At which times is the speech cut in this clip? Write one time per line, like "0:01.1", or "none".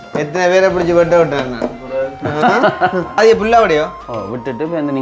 0:03.2